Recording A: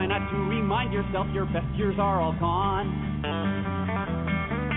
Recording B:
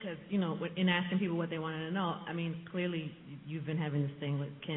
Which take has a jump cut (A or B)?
B